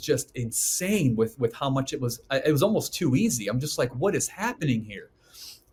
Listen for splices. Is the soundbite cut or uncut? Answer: uncut